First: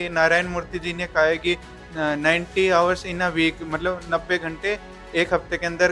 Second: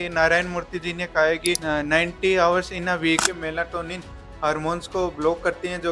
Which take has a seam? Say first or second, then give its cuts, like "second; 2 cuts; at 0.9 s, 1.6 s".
second; 2 cuts; at 1.6 s, 3.2 s